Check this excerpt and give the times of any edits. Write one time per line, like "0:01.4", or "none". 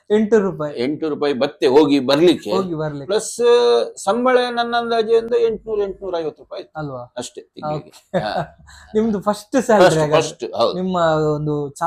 none